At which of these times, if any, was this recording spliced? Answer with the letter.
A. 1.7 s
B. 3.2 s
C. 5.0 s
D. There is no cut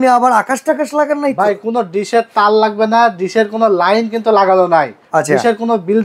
C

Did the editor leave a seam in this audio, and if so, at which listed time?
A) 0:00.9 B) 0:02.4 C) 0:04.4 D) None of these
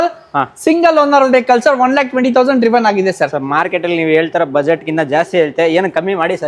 D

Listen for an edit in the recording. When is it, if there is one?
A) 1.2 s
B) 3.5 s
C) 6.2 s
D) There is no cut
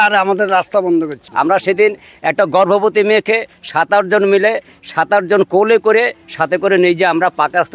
A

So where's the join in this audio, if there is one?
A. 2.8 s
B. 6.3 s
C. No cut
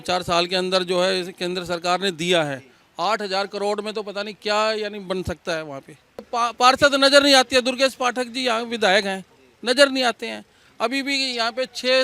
B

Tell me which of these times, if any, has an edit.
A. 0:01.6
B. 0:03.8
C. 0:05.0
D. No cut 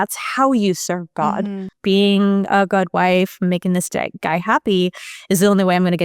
A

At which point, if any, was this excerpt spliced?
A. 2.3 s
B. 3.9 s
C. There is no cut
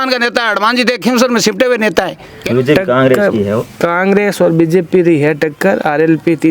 A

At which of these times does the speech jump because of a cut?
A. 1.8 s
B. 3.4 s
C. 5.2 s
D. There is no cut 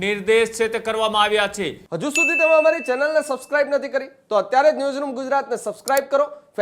A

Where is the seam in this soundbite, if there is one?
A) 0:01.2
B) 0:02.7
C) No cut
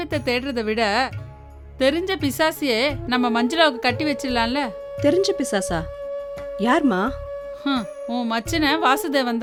C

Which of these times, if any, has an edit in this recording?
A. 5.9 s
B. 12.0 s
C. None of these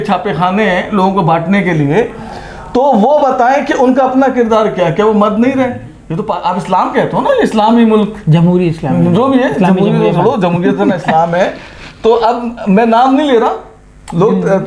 A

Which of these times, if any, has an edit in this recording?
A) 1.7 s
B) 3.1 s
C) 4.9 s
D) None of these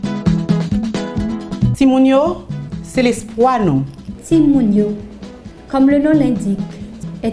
A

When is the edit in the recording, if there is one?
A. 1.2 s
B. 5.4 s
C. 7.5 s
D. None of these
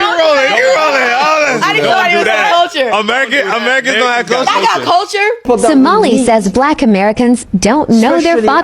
B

